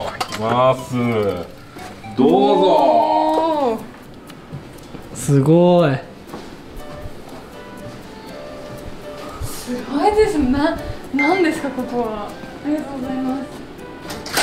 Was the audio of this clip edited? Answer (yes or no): no